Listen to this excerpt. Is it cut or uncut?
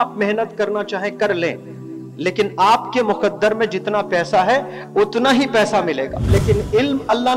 cut